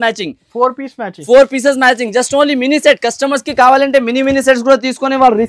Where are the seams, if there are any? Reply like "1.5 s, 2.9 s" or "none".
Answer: none